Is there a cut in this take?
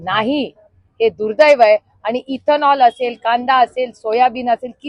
no; 0 cuts

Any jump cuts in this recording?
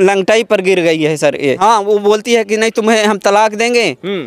yes; 1 cut; at 1.6 s

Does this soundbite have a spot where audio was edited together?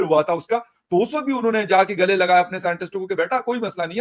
no; 0 cuts

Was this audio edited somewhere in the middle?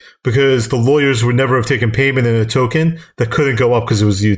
no; 0 cuts

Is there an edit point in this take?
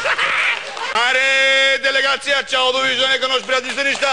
yes; 1 cut; at 0.9 s

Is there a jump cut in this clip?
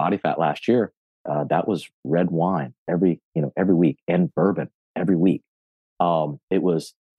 no; 0 cuts

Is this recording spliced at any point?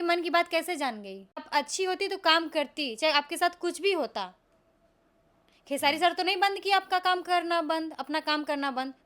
yes; 1 cut; at 1.5 s

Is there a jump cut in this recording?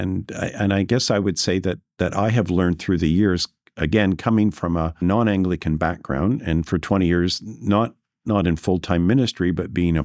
yes; 1 cut; at 5.0 s

